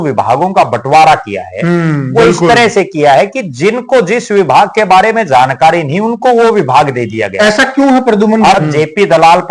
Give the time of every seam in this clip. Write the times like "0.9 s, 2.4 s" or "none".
8.6 s